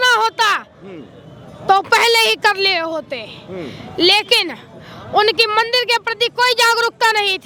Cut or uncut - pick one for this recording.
uncut